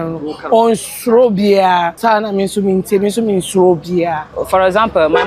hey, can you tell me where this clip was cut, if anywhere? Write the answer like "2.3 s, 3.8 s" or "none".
1.9 s, 4.3 s